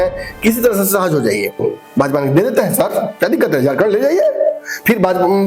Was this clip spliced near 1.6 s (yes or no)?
yes